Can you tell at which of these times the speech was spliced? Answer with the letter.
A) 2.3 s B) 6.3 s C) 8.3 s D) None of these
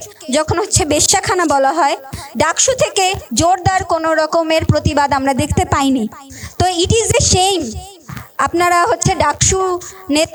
D